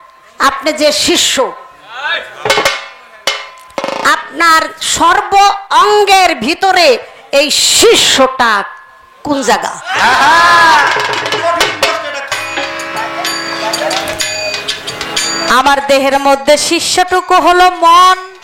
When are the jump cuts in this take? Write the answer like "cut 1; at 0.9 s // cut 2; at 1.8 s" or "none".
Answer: cut 1; at 12.3 s